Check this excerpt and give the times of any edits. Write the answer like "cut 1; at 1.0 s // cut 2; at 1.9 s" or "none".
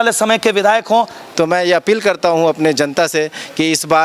cut 1; at 1.2 s